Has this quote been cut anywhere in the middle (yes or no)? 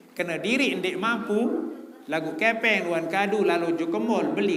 no